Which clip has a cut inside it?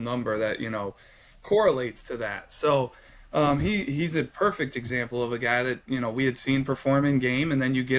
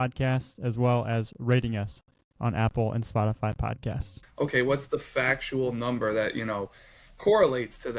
second; 1 cut; at 4.2 s

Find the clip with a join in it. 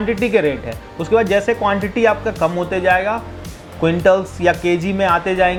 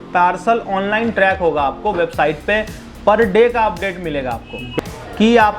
second; 1 cut; at 4.7 s

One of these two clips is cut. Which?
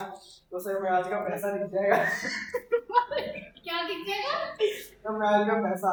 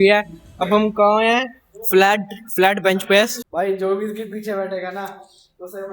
second; 1 cut; at 3.4 s

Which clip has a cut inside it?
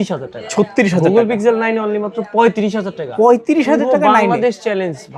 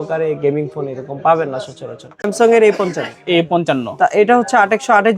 second; 1 cut; at 2.2 s

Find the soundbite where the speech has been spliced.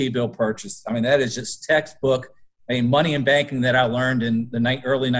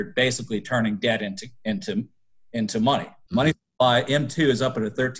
second; 1 cut; at 3.1 s

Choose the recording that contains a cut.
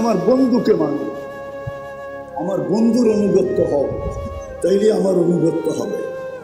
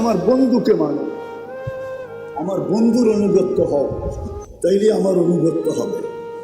second; 2 cuts; at 1.1 s, 2.3 s

